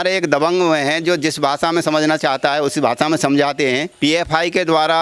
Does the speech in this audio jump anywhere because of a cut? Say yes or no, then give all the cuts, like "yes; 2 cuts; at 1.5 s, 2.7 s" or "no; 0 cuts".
yes; 1 cut; at 3.9 s